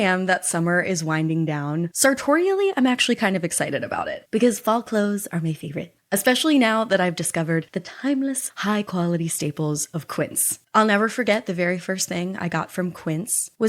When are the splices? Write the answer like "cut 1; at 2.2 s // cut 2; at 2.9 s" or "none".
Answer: cut 1; at 10.5 s